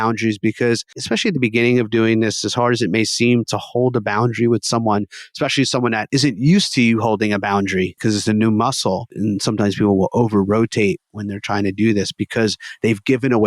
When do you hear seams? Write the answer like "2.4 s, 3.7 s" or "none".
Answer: 1.0 s, 6.0 s, 8.0 s, 9.1 s